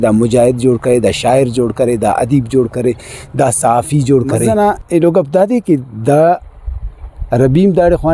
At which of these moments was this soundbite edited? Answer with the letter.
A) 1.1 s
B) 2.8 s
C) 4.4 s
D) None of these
C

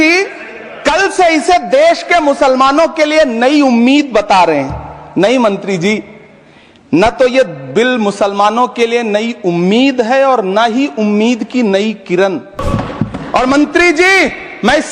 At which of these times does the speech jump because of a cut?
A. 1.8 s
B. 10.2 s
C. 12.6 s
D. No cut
C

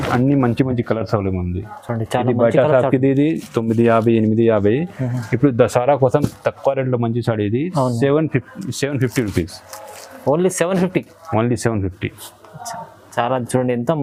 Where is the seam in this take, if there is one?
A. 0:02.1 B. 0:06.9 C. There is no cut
C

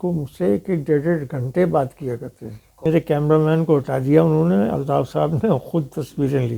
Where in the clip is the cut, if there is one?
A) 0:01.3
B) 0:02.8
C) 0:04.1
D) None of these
B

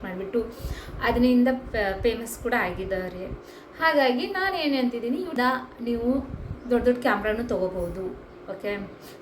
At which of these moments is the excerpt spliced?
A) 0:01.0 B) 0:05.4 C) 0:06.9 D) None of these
B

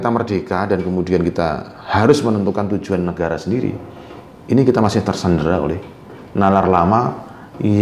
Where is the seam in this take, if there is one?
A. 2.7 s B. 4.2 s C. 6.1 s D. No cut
D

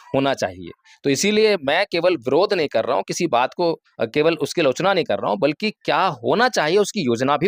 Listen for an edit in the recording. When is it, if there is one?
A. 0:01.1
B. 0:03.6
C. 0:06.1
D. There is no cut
D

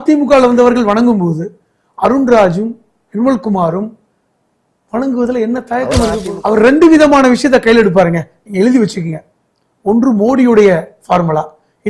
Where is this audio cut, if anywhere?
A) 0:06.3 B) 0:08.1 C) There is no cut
A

